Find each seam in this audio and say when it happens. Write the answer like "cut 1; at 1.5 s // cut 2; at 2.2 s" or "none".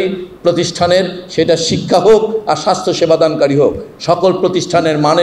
none